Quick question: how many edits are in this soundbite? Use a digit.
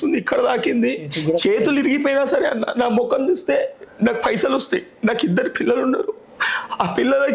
0